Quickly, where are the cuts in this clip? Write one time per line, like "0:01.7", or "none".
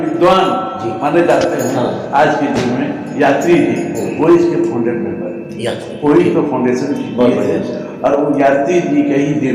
none